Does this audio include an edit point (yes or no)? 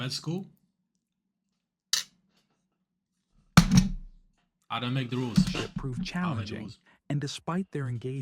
no